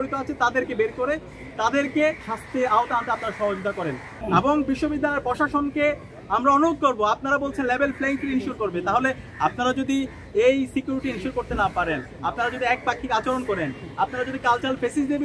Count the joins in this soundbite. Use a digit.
2